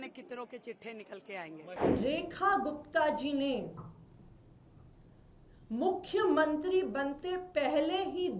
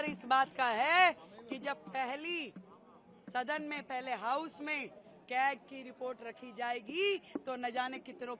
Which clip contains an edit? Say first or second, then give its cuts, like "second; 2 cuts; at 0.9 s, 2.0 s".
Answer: first; 1 cut; at 1.6 s